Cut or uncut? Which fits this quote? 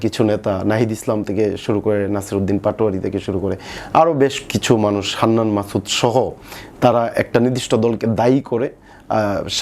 uncut